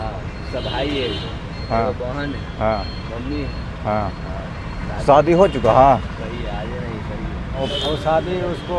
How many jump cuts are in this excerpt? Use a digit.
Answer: 1